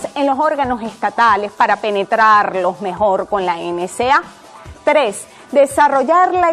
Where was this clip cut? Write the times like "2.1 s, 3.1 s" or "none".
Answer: none